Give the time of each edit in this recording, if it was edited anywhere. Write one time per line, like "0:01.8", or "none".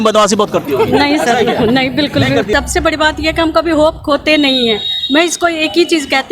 0:02.5